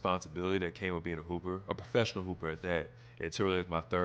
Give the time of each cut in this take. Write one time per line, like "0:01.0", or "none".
none